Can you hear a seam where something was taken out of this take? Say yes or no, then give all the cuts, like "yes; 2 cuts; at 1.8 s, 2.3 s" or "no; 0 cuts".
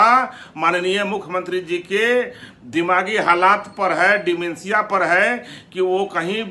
no; 0 cuts